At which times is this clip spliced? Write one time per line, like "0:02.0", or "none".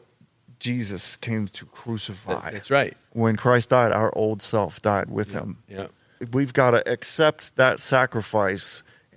0:03.1
0:06.2